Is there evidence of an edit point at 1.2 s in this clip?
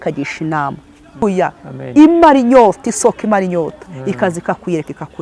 yes; 1 cut; at 1.2 s

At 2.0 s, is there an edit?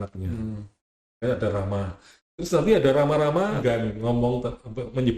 no; 1 cut; at 3.6 s

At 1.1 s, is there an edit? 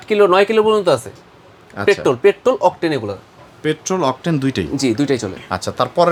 no; 0 cuts

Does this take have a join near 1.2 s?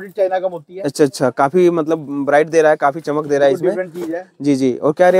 no; 0 cuts

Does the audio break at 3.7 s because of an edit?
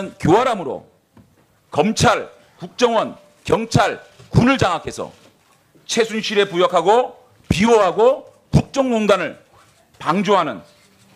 yes; 1 cut; at 3.7 s

